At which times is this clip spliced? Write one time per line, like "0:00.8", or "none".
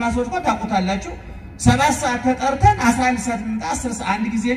none